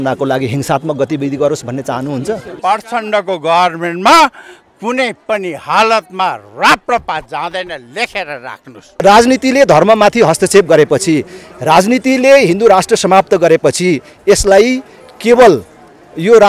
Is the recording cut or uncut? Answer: cut